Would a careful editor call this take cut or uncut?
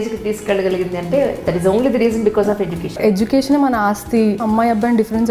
cut